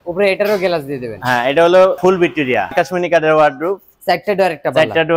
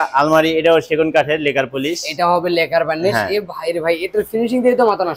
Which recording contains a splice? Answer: first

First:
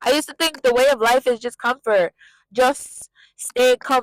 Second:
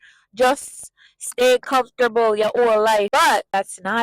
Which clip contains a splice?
second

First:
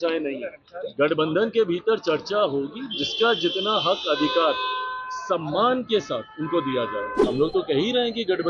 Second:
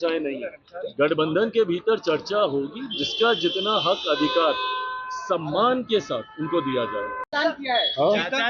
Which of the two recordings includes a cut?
first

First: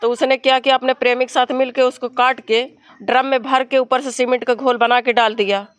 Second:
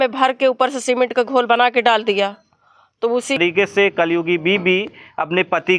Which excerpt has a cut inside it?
second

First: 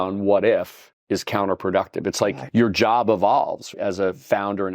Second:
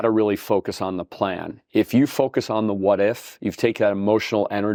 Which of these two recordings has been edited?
first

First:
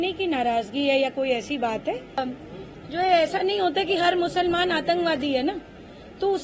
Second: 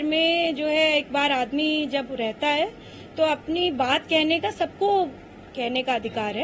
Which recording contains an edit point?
first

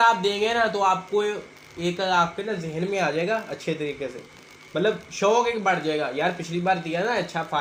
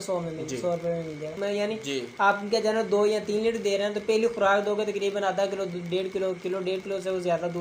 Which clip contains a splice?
second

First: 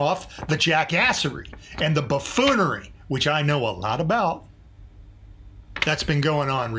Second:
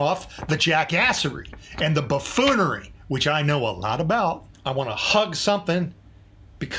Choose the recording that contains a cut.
second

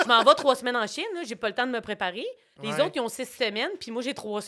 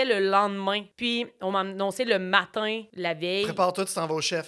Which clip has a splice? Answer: second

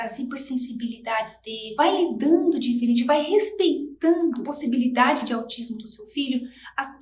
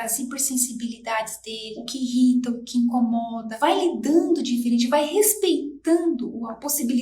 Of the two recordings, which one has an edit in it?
first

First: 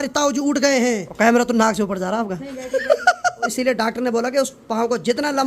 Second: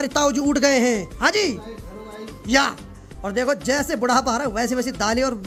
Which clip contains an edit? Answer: first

